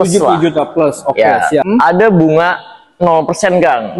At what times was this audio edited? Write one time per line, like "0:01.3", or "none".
0:01.6

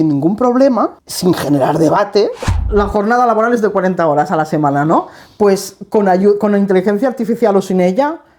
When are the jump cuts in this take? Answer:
0:01.0
0:02.5

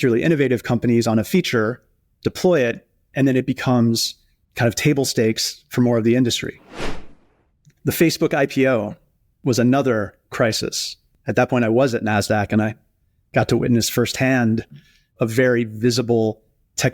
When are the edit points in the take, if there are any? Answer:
0:07.0

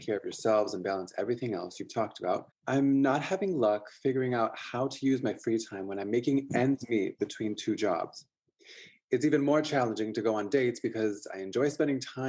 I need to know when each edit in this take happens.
0:02.5

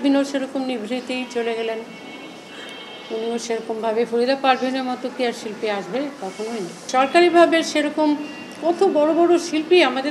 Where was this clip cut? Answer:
0:06.8

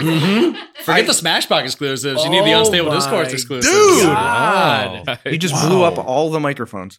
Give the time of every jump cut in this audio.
0:05.0

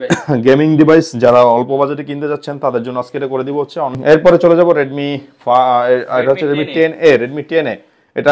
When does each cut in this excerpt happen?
0:03.9

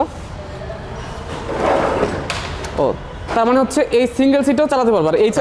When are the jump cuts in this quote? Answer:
none

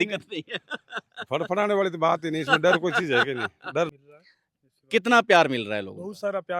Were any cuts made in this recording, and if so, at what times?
0:03.9

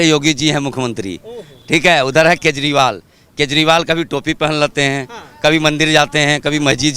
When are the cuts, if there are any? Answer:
none

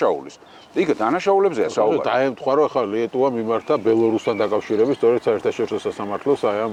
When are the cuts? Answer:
none

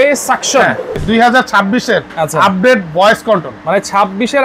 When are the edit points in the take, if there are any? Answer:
0:01.0

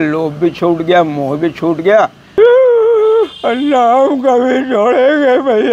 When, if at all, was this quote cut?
0:02.2

